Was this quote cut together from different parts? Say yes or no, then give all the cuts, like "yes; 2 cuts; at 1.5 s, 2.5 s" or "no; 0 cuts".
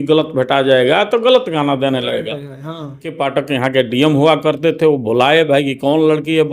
yes; 1 cut; at 3.2 s